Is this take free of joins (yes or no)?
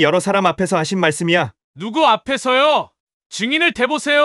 yes